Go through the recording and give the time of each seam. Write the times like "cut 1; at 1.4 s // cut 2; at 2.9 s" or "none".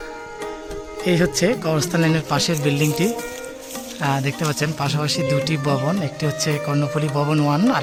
none

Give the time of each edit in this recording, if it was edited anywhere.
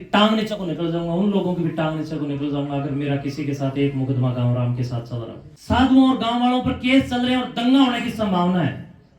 cut 1; at 5.5 s

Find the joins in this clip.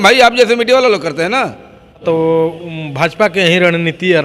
cut 1; at 2.0 s

